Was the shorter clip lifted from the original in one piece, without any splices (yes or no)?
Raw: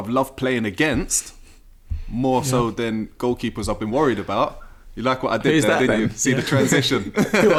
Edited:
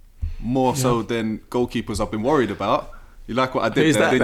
yes